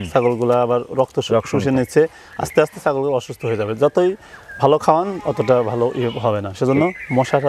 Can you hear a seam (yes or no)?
no